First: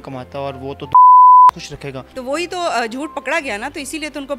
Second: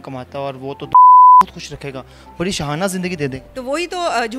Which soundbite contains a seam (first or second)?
first